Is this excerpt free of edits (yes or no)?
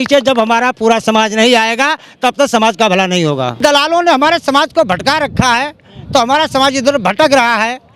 no